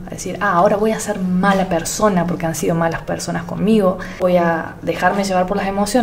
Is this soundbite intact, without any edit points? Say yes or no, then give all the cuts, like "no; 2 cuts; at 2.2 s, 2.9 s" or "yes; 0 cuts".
no; 1 cut; at 4.2 s